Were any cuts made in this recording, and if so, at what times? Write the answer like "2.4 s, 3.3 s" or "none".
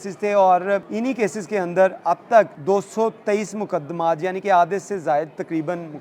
0.9 s, 2.6 s